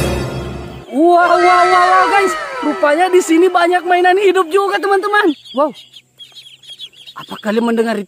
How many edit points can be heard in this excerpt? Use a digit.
1